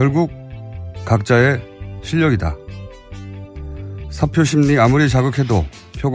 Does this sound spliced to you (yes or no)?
yes